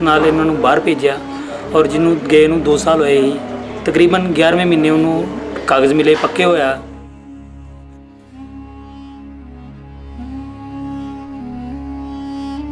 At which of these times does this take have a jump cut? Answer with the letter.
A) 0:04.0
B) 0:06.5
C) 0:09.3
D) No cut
B